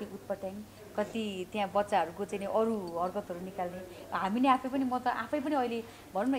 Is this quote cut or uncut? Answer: uncut